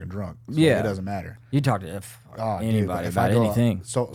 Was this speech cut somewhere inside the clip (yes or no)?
no